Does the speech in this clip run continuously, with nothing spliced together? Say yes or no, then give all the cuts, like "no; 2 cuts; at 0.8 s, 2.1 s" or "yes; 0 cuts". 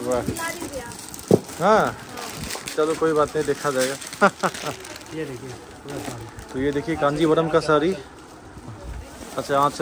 yes; 0 cuts